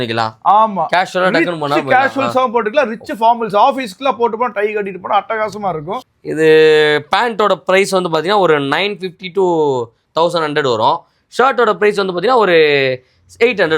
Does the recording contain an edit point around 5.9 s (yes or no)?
yes